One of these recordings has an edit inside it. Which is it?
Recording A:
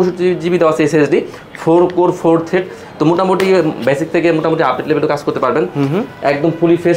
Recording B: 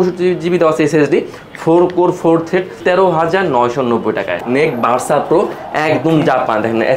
B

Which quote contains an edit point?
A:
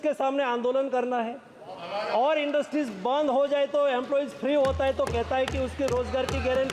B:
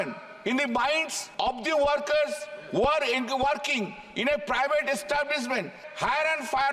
B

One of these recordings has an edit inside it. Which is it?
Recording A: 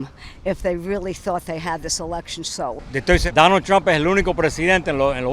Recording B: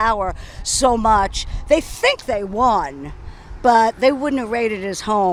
A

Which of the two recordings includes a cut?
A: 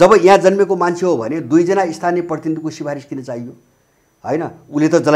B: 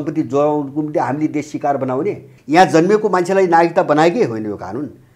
B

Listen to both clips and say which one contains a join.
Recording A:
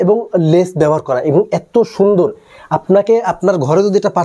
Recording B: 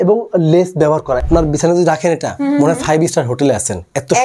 B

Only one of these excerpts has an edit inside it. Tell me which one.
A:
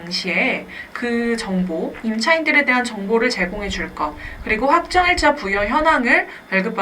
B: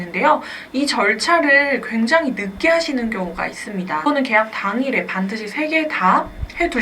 B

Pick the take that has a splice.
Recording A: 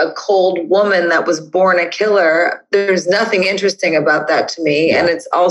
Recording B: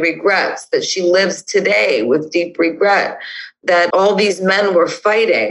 B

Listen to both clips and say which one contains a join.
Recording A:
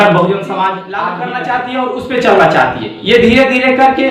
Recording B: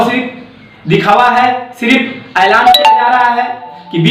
A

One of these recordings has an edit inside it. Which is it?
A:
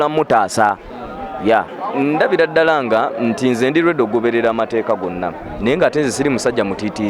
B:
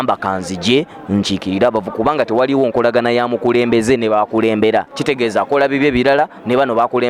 A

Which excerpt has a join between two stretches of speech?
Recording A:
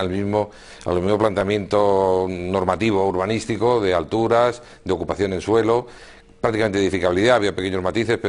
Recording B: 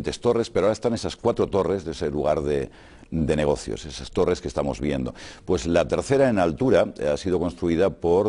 B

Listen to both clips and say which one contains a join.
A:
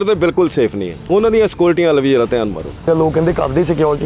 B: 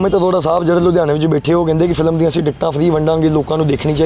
A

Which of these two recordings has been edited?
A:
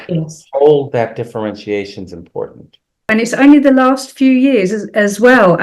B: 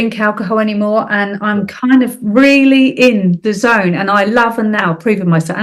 A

